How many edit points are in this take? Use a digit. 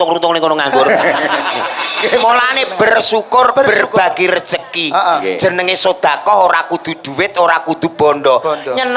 0